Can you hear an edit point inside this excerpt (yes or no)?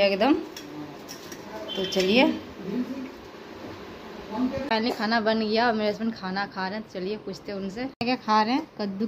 no